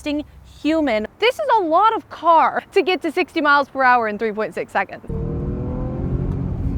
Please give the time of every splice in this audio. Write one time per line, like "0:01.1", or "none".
0:01.1
0:02.6
0:05.1